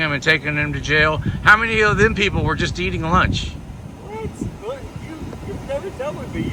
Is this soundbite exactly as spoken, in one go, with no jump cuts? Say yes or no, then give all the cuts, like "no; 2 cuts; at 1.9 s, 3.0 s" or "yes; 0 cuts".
yes; 0 cuts